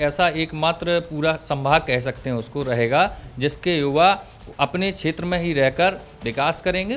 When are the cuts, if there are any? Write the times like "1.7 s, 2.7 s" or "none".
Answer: none